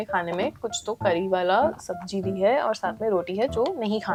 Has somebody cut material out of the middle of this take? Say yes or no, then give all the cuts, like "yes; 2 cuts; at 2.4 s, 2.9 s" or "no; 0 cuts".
no; 0 cuts